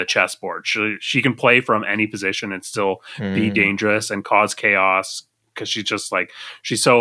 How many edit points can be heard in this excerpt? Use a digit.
0